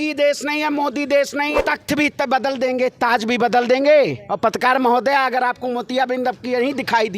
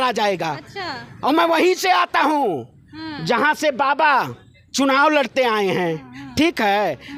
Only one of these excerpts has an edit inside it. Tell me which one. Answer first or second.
first